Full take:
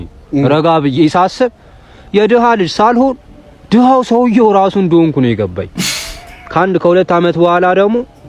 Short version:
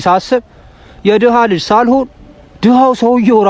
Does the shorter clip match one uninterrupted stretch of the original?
yes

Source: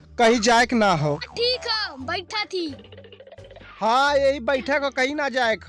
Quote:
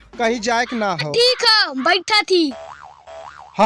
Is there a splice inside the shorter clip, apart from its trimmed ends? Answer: yes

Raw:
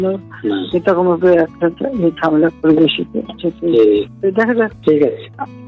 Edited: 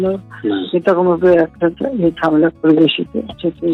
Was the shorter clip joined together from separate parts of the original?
no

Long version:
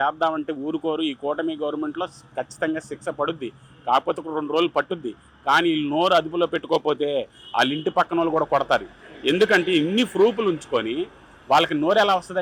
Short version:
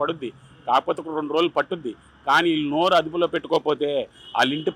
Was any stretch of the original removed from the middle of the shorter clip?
no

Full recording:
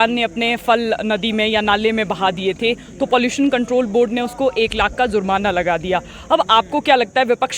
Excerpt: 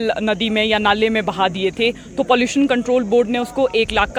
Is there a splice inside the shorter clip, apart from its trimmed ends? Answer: no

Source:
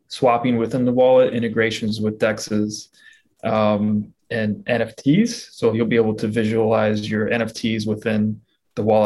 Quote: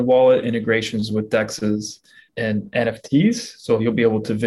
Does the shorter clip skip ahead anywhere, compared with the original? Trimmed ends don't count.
yes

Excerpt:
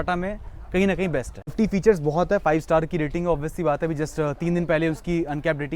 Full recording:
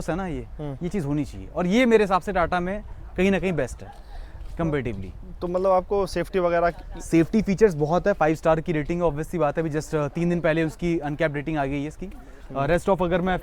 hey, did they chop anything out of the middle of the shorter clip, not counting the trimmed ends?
yes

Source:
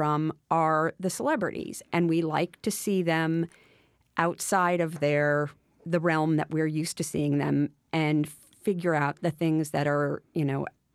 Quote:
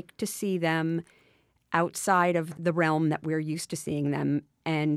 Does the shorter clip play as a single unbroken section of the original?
no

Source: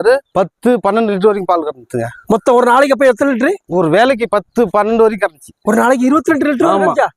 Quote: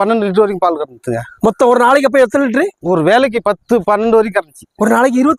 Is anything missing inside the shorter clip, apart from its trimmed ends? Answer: no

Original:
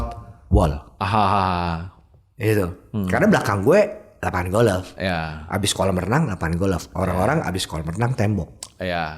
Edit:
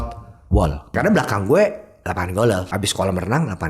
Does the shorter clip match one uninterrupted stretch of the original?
no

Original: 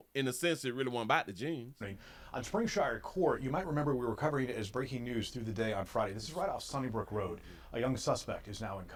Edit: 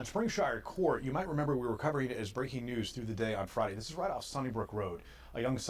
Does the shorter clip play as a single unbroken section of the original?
yes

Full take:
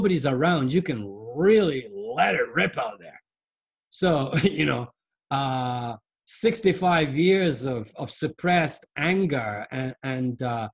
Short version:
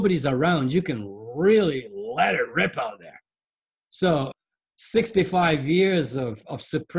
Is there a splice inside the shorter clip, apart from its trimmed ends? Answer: yes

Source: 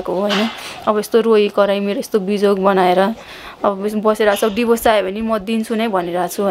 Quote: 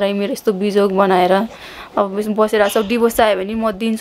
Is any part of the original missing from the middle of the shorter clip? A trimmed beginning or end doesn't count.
no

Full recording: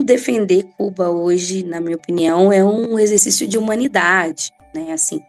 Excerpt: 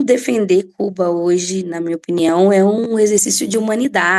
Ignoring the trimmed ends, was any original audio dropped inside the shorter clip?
no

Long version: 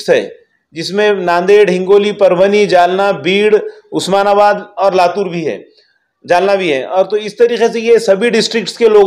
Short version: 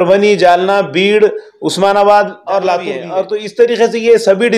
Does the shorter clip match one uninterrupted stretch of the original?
no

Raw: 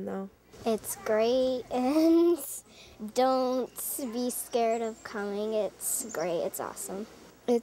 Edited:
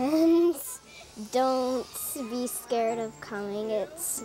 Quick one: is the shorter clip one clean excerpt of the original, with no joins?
yes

